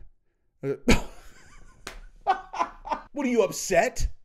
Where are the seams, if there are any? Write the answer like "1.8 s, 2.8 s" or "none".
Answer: 3.1 s

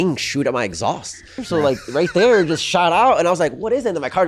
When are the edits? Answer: 1.4 s

